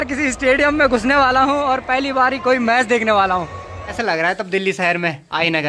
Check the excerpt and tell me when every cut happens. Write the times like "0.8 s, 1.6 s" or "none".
3.9 s